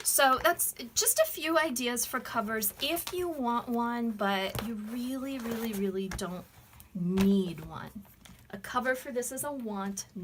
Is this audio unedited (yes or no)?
yes